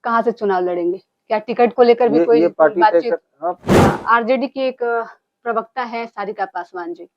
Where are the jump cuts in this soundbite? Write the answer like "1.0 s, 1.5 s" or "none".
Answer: 3.7 s

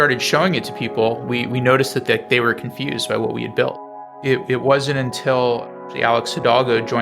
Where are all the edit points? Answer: 3.9 s

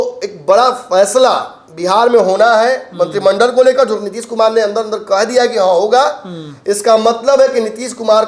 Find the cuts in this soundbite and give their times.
none

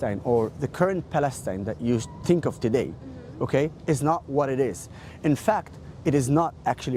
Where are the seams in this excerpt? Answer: none

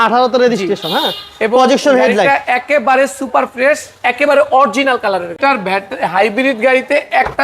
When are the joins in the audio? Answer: 5.3 s

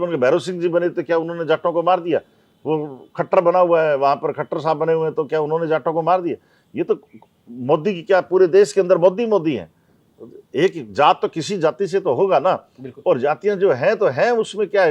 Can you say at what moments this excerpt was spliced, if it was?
none

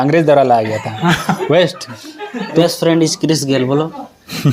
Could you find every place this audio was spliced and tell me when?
2.6 s

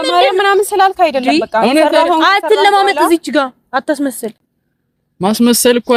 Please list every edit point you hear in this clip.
none

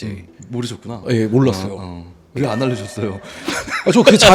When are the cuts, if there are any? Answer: 2.3 s

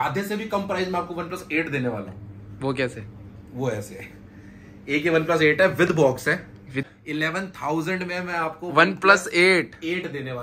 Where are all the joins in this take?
6.9 s

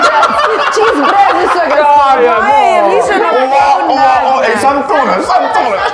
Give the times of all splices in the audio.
none

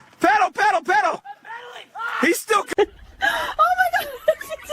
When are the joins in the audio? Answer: 2.7 s

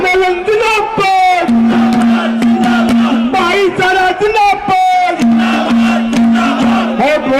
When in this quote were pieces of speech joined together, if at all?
none

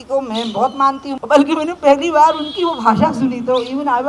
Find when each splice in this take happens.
1.1 s

